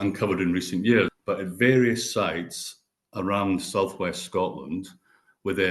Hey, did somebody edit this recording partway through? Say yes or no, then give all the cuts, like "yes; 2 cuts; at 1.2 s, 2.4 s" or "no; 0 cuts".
yes; 1 cut; at 1.1 s